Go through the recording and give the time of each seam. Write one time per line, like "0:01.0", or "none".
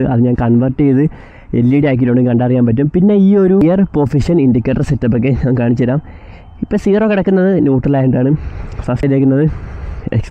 0:03.6
0:09.0